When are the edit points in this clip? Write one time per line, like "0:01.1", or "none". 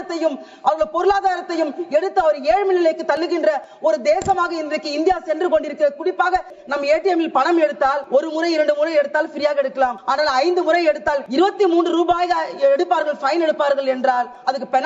0:06.6
0:08.0
0:10.0
0:11.2